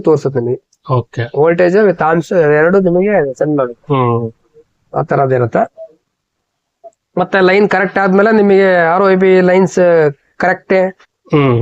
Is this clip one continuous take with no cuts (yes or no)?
yes